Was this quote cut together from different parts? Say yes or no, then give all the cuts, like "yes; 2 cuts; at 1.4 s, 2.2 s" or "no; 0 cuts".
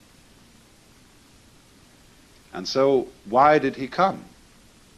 yes; 1 cut; at 3.2 s